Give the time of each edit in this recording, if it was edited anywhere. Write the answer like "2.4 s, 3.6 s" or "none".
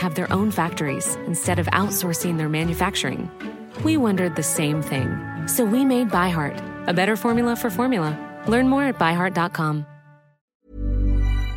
10.5 s